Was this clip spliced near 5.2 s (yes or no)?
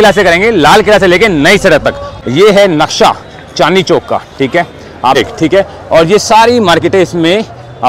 yes